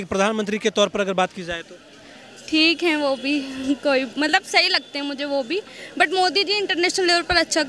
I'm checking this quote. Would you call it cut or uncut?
uncut